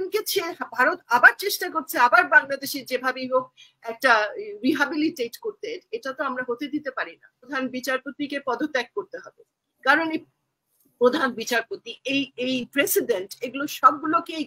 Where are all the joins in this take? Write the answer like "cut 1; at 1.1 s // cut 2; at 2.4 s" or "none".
cut 1; at 7.5 s